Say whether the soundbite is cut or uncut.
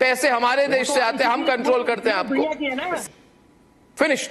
uncut